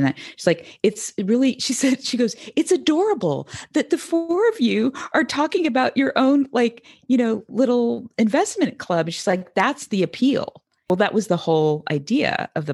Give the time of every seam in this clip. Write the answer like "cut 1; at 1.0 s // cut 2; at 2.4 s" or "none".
none